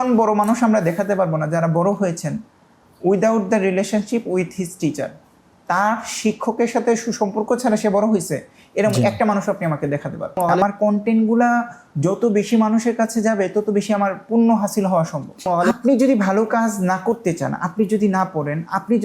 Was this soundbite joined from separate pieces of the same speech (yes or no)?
yes